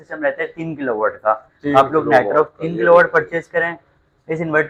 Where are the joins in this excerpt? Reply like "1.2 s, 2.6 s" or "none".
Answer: none